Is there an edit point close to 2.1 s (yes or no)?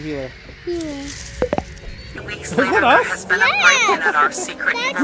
yes